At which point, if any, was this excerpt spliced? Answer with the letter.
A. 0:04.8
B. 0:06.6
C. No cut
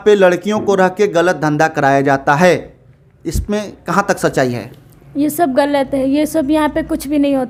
C